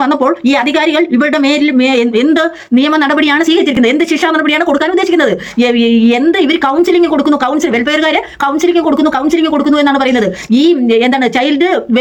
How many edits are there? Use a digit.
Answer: 0